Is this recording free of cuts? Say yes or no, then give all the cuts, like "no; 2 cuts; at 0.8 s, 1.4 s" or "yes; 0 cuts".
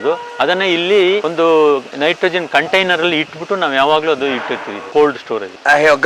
no; 2 cuts; at 1.3 s, 1.9 s